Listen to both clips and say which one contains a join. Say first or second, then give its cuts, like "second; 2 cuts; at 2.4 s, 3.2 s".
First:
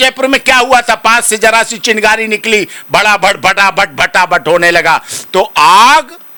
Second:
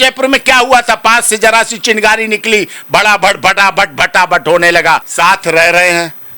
second; 1 cut; at 5.1 s